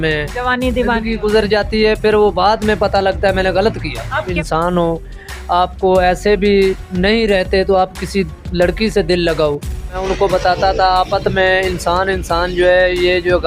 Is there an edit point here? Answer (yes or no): yes